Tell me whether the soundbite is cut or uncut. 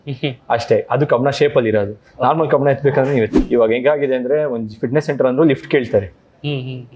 cut